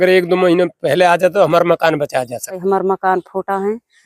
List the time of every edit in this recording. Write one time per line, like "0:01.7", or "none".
0:02.6